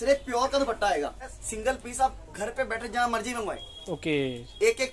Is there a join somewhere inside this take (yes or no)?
yes